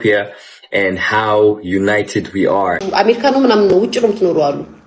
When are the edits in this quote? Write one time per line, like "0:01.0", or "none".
0:02.9

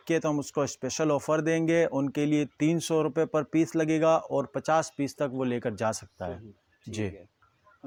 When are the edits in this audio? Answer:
none

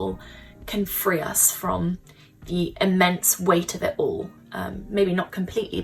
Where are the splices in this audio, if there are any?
none

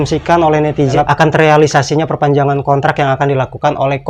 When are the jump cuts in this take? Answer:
0:00.9

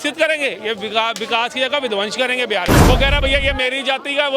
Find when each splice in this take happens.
0:02.8

